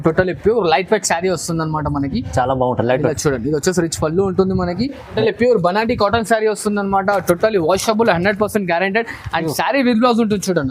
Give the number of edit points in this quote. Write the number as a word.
one